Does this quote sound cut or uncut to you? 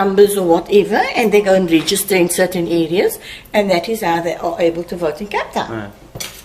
uncut